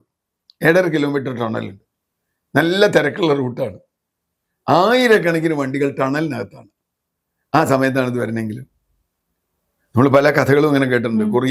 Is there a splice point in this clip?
no; 0 cuts

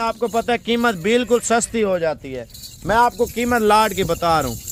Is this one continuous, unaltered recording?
yes; 0 cuts

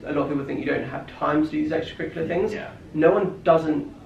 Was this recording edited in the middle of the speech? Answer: no; 0 cuts

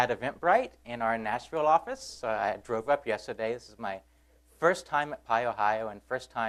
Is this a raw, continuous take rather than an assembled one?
yes; 0 cuts

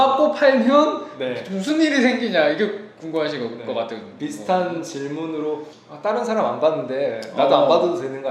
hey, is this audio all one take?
yes; 0 cuts

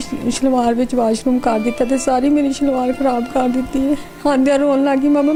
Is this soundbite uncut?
yes; 0 cuts

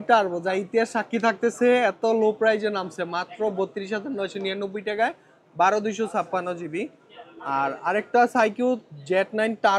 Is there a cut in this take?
no; 0 cuts

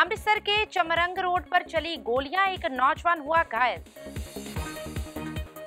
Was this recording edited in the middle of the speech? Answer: yes; 1 cut; at 3.9 s

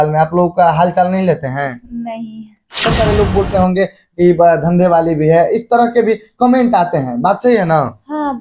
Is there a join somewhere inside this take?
yes; 1 cut; at 2.9 s

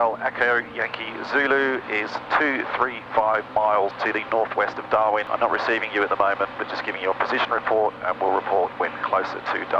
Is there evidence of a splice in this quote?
yes; 2 cuts; at 4.0 s, 5.3 s

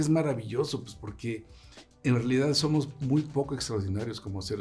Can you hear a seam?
no; 0 cuts

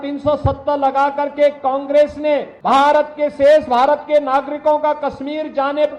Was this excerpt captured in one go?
no; 1 cut; at 2.5 s

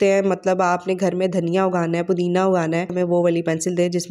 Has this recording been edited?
yes; 1 cut; at 2.9 s

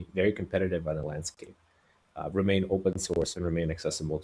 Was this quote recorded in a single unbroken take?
yes; 0 cuts

